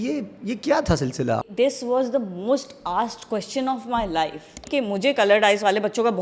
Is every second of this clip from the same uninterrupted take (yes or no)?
no